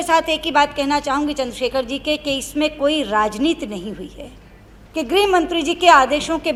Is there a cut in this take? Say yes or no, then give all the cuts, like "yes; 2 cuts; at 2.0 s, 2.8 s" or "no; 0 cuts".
no; 0 cuts